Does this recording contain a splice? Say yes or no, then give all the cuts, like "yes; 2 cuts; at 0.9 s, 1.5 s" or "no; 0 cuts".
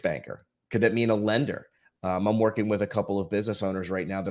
no; 0 cuts